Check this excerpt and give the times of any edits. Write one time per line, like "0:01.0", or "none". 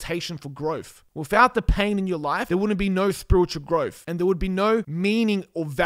0:01.0
0:02.4
0:04.0
0:04.9